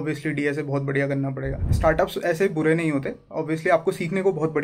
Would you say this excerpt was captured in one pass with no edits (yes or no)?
no